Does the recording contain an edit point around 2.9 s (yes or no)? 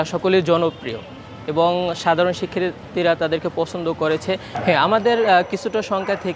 no